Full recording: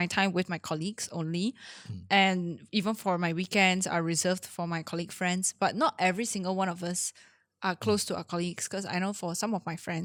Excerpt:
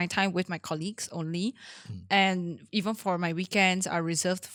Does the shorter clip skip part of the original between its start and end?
no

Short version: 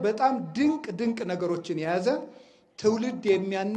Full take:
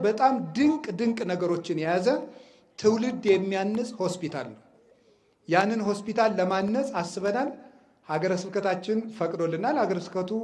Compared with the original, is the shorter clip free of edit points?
yes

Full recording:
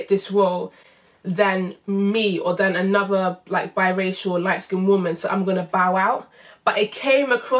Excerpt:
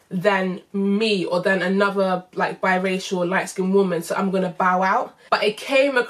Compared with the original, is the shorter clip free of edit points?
no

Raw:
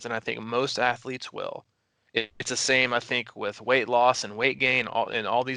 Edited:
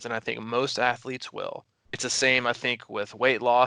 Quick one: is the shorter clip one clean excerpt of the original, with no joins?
no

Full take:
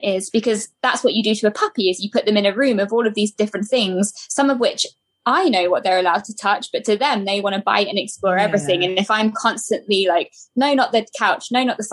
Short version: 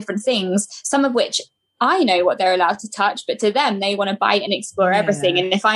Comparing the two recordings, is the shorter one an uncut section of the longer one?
yes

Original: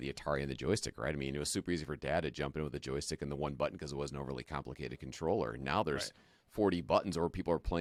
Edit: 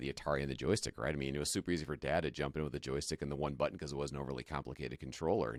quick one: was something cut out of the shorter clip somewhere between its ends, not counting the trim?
no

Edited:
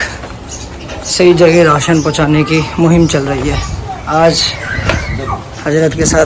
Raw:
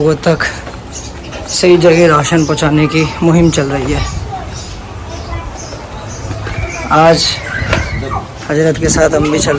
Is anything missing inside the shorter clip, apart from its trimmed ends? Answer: yes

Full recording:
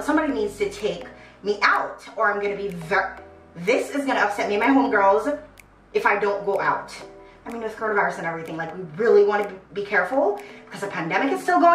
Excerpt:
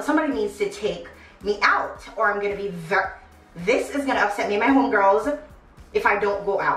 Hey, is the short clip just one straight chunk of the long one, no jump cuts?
yes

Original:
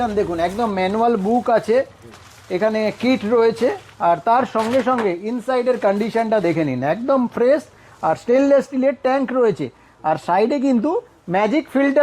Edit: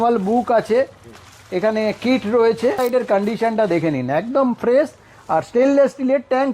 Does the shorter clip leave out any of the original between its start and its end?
yes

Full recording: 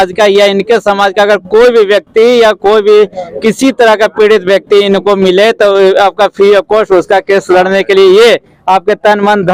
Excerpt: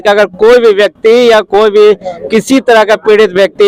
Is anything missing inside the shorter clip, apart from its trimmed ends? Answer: no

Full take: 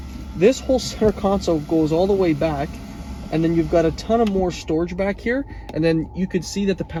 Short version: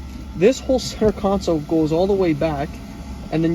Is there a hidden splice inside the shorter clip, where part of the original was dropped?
no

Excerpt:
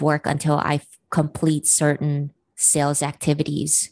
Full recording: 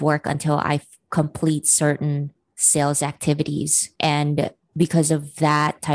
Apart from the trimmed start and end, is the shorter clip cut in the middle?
no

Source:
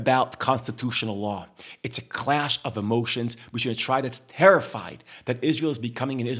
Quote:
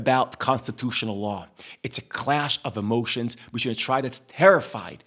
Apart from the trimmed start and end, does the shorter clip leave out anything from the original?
no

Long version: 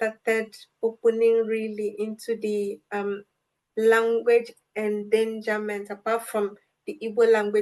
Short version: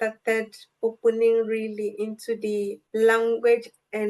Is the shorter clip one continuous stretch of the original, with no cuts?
no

